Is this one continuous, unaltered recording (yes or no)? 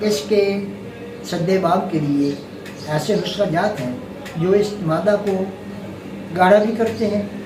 yes